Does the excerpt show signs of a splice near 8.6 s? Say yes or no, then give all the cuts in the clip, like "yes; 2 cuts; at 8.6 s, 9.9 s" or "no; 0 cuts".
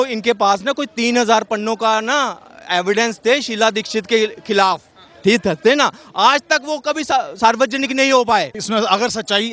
yes; 1 cut; at 8.6 s